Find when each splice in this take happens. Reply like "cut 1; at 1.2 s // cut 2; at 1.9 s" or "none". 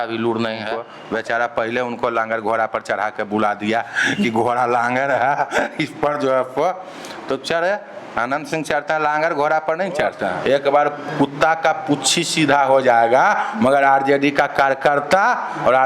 cut 1; at 0.9 s // cut 2; at 10.4 s